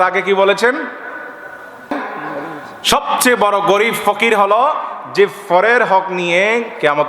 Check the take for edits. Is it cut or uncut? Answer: cut